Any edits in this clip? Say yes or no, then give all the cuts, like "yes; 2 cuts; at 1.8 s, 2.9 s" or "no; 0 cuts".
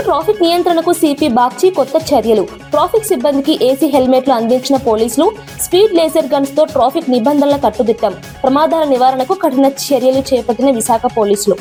no; 0 cuts